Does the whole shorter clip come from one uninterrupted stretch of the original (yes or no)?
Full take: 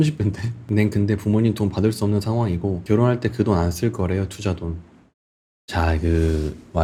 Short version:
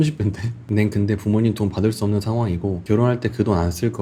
yes